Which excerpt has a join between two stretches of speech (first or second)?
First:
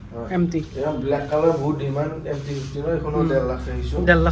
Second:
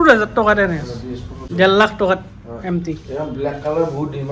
second